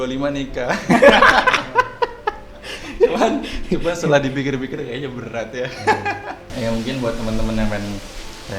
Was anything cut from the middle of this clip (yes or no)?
yes